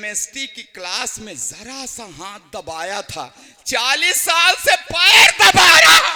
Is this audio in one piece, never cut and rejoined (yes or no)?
yes